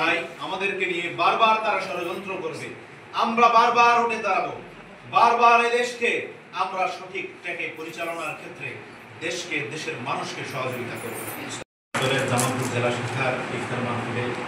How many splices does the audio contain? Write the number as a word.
one